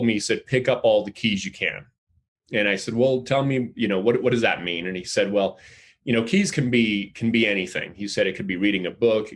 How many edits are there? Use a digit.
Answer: 0